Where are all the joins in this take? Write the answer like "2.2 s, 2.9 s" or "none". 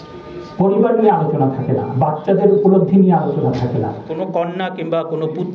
4.1 s